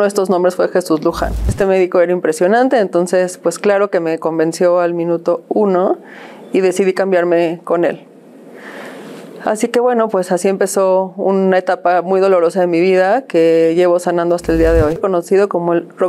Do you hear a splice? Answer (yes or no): yes